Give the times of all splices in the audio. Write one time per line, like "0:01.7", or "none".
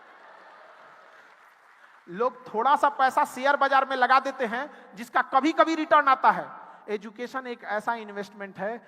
0:01.4